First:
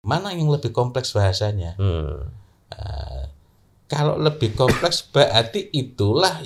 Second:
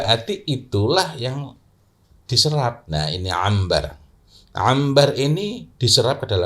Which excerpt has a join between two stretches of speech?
second; 1 cut; at 2.8 s

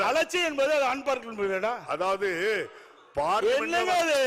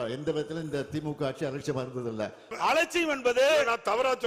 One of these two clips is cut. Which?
second; 1 cut; at 2.5 s

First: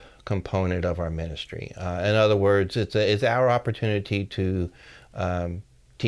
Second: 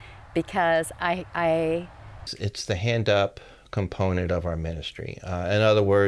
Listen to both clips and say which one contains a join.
second; 1 cut; at 2.3 s

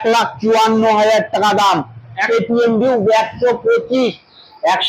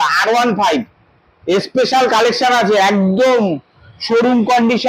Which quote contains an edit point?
first; 1 cut; at 2.2 s

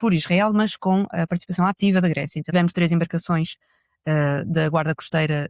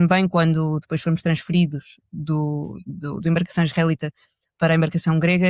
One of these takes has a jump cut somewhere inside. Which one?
first; 1 cut; at 2.4 s

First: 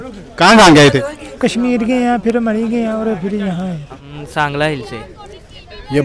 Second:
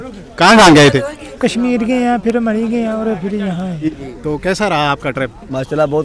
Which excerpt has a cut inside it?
first; 1 cut; at 3.8 s

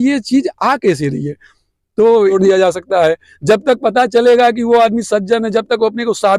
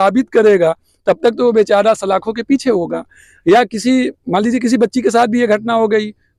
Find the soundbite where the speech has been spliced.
first; 1 cut; at 2.3 s

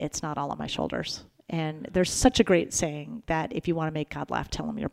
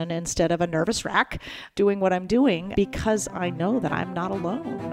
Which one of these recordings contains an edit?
second; 2 cuts; at 1.7 s, 2.6 s

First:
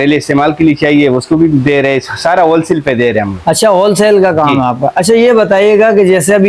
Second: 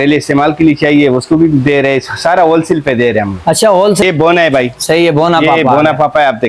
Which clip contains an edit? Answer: second; 1 cut; at 4.0 s

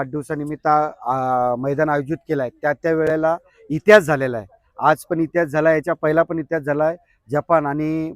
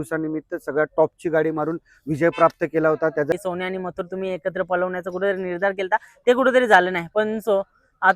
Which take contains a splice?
second; 1 cut; at 3.3 s

